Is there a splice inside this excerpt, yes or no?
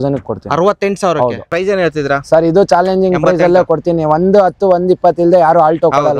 yes